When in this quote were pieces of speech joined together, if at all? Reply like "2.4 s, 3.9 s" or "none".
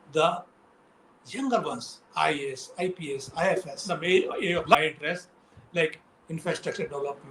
3.8 s

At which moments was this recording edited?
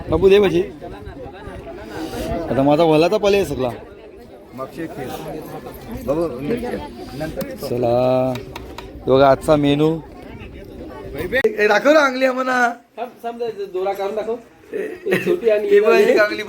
11.4 s

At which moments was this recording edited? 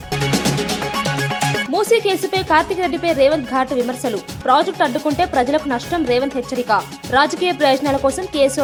none

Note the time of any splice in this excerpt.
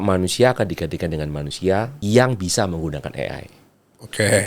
1.9 s

